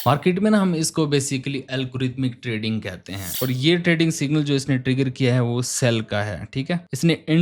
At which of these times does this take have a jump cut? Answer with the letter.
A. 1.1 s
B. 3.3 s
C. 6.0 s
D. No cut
B